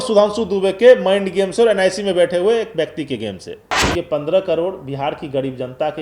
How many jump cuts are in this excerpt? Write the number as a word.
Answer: one